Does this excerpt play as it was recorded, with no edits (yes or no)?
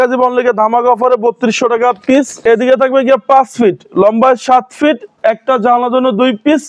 no